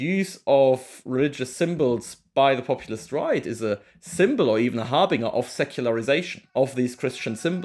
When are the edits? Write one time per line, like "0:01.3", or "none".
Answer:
0:06.4